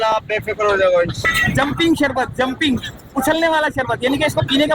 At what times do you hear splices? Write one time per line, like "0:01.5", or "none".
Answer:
0:01.2